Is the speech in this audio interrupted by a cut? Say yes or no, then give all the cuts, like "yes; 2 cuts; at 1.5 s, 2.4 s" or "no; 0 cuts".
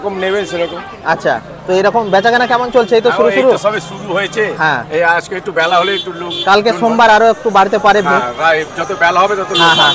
no; 0 cuts